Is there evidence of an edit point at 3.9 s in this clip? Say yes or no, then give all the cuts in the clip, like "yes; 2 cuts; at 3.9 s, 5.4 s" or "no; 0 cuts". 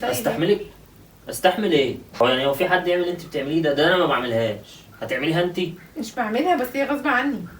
no; 1 cut; at 2.1 s